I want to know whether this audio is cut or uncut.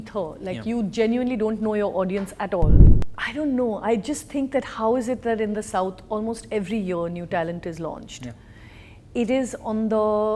cut